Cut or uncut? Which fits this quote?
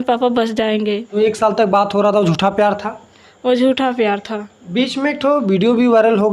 cut